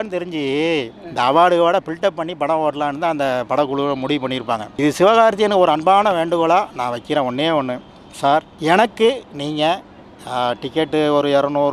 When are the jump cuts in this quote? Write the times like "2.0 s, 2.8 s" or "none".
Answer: none

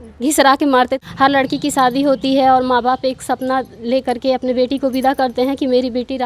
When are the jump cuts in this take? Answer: 1.0 s

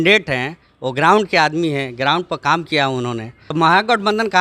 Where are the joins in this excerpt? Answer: 3.3 s

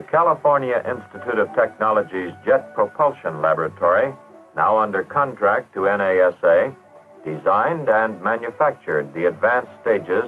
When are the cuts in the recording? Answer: none

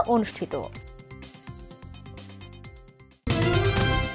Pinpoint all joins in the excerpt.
3.2 s

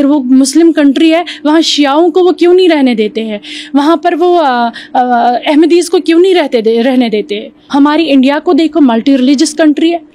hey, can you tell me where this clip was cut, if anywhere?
7.6 s

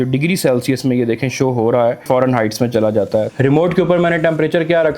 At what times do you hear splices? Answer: 2.0 s, 3.3 s

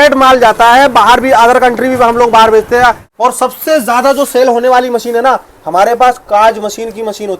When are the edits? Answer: 3.1 s

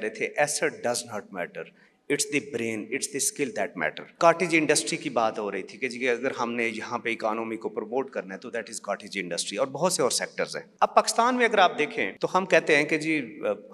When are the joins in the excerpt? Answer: 4.0 s, 10.6 s, 12.1 s

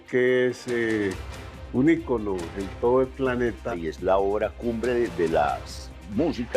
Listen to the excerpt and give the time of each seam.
3.7 s

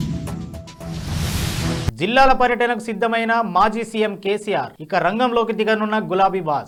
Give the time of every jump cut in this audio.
none

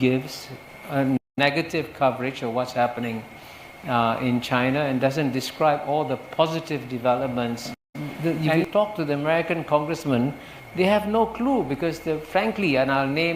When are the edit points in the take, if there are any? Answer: 8.0 s

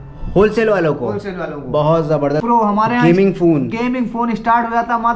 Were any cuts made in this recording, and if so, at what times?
2.4 s

